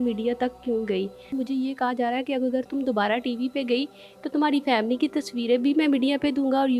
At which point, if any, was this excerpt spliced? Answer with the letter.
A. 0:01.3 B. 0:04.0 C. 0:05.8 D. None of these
A